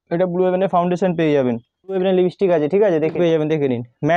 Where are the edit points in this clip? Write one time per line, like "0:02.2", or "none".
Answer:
0:02.0
0:03.1